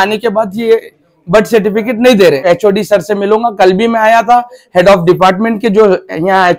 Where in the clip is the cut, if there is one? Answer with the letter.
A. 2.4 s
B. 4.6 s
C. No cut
A